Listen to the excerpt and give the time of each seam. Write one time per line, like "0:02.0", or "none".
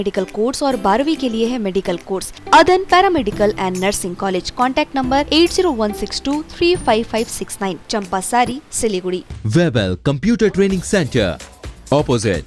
0:02.4
0:09.3